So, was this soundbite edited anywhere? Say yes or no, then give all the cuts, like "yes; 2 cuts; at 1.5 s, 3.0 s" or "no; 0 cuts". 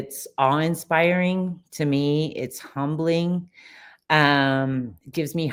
no; 0 cuts